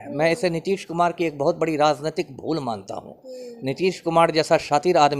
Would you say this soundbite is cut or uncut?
uncut